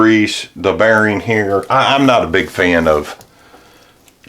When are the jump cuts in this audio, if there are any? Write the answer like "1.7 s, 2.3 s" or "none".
1.7 s